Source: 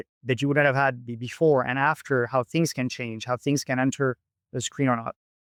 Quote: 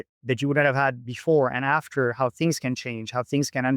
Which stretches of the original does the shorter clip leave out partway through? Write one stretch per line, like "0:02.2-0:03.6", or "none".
0:01.1-0:01.2